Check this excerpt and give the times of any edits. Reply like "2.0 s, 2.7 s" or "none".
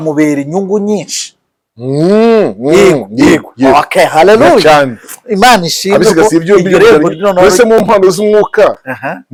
none